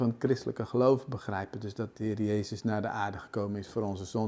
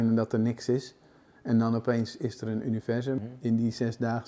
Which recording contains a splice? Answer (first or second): second